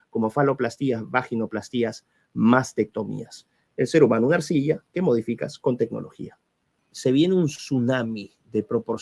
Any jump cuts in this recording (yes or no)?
yes